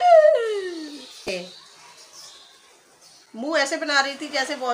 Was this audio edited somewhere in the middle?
yes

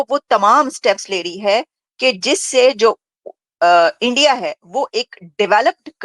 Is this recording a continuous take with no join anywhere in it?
yes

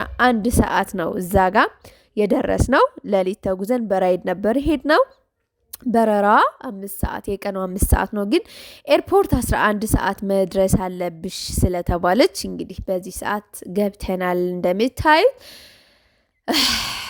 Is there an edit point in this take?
no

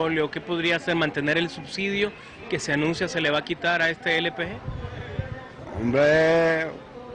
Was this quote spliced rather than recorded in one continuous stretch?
yes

